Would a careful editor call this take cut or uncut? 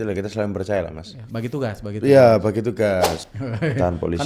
cut